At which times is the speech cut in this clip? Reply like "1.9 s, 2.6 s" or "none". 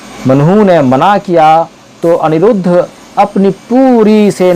none